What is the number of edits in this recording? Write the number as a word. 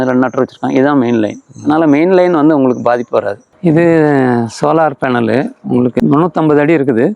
two